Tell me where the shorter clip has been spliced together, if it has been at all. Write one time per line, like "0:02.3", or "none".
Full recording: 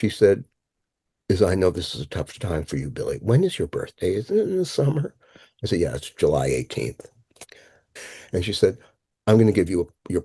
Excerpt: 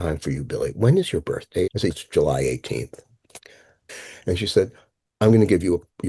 0:01.8